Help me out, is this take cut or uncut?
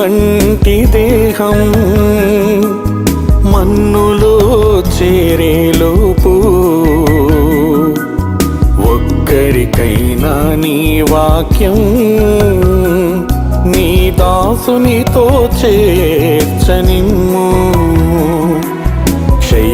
uncut